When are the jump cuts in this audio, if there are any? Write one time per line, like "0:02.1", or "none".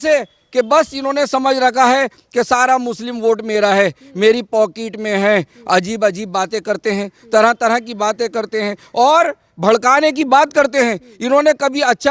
none